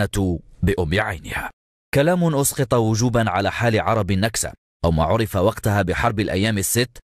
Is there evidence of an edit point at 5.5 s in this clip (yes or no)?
no